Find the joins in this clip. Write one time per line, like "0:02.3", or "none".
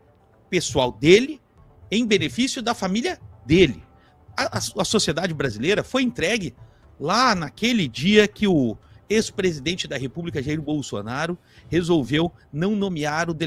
none